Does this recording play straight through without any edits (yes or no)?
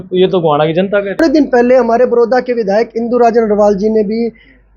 no